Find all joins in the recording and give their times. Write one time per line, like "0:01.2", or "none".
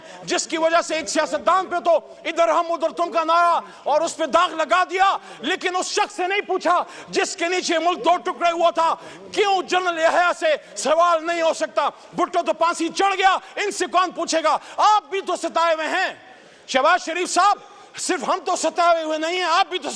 none